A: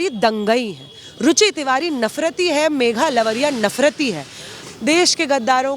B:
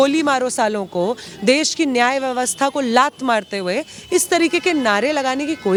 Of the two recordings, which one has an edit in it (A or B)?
A